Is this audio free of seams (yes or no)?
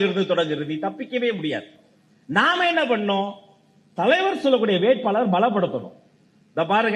yes